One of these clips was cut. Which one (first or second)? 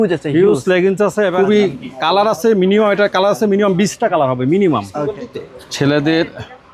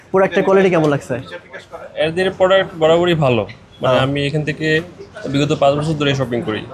first